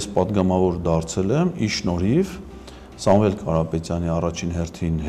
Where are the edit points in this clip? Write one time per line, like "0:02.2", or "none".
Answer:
none